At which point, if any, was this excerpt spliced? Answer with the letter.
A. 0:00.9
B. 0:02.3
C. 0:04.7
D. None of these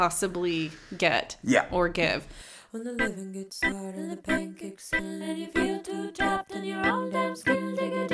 B